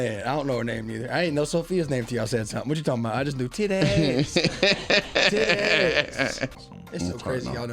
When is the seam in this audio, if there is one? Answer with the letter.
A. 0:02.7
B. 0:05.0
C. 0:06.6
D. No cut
C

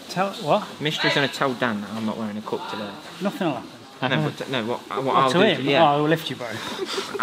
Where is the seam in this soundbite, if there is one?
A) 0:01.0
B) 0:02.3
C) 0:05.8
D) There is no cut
D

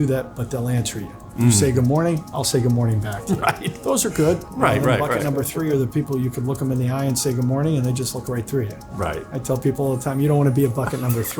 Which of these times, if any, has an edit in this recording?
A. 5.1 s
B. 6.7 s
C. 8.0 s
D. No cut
A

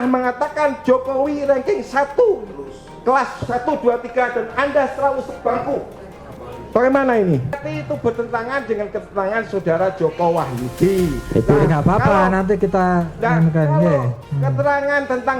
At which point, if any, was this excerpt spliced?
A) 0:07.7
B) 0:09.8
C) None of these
A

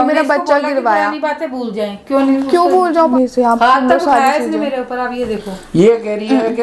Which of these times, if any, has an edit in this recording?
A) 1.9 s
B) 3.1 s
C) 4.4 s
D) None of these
B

